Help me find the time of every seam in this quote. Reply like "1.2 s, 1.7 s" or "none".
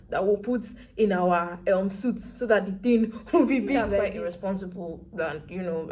4.1 s